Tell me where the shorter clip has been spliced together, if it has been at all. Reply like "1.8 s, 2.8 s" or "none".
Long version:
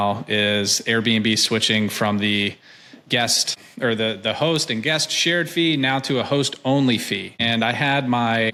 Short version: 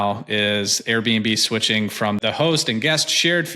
2.2 s